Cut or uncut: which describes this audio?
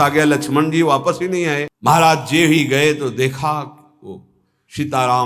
cut